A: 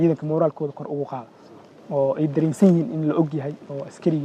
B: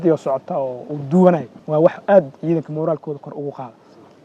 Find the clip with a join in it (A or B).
B